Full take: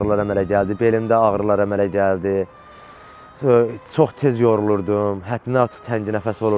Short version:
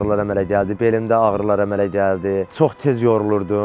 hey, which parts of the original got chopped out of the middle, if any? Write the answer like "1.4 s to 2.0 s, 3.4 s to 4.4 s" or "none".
2.5 s to 3.9 s